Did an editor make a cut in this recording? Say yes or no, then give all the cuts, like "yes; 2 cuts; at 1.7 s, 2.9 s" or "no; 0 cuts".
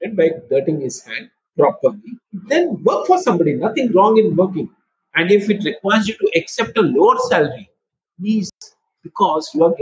no; 0 cuts